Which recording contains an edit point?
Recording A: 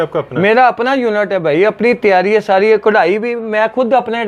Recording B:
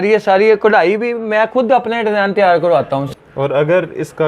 B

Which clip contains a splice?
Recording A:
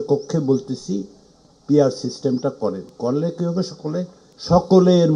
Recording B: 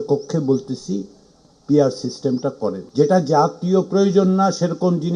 B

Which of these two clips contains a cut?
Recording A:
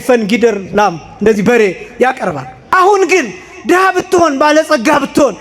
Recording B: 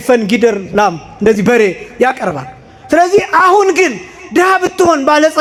A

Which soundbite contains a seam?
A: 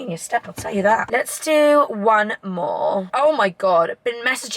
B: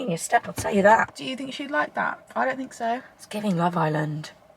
B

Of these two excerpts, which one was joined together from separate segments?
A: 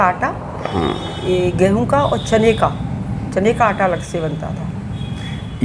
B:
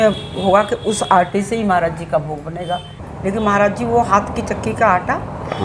B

